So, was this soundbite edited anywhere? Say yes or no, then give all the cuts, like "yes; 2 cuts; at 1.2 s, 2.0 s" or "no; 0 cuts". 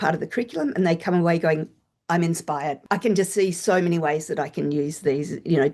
yes; 1 cut; at 2.8 s